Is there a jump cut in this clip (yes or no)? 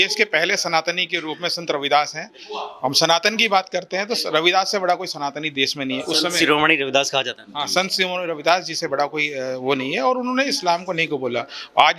no